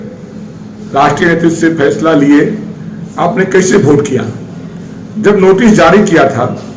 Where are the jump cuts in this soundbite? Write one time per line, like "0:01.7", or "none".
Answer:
none